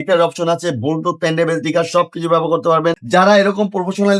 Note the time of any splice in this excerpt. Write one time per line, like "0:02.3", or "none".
0:03.0